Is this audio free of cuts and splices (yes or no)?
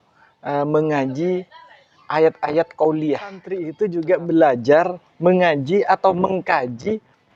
no